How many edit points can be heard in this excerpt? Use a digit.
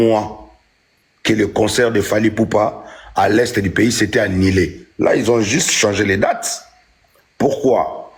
0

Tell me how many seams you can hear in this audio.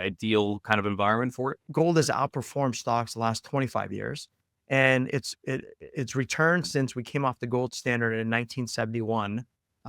1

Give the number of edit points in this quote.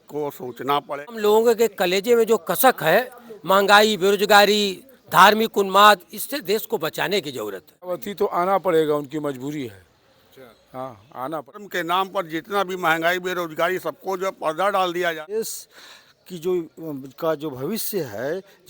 4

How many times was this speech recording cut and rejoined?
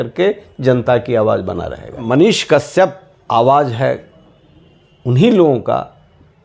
2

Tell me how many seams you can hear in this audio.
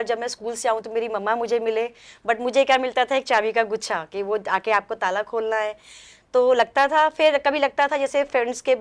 0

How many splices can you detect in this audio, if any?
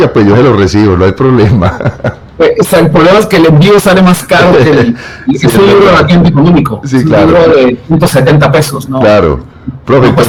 0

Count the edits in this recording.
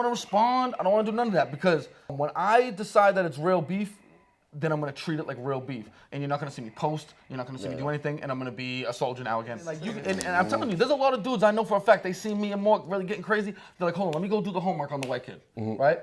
1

